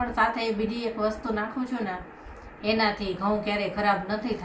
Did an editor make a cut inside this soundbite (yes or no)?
no